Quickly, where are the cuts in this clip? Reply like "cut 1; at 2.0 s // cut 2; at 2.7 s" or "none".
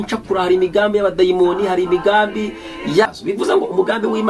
cut 1; at 3.1 s